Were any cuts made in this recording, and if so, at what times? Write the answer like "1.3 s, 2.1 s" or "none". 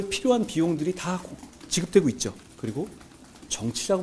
2.5 s